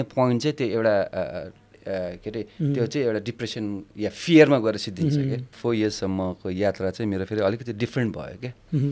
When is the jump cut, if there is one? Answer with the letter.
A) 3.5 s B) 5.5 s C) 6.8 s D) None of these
B